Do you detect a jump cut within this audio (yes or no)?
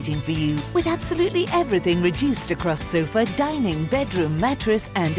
no